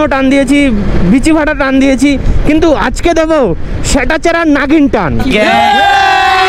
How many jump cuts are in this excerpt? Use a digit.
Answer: 0